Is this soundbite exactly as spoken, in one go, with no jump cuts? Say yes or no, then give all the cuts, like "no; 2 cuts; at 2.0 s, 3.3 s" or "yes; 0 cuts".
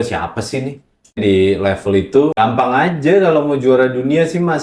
no; 2 cuts; at 1.0 s, 2.3 s